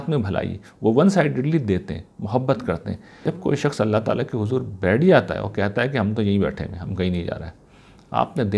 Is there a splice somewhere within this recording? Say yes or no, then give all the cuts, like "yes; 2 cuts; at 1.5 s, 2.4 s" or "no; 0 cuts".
yes; 1 cut; at 3.2 s